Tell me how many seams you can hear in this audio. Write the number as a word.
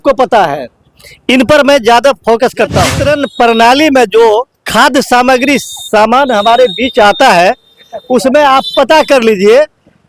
one